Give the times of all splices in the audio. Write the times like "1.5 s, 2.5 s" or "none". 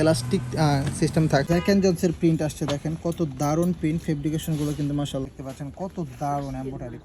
1.4 s, 5.3 s